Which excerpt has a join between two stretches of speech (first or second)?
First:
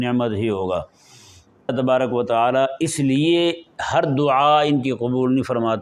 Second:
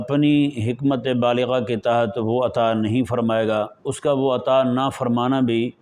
first